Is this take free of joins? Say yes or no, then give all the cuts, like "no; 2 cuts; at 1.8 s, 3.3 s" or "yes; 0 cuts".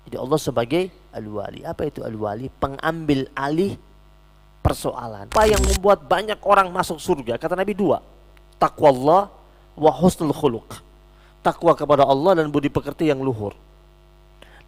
no; 1 cut; at 5.3 s